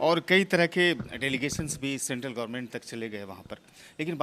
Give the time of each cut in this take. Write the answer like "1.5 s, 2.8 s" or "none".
none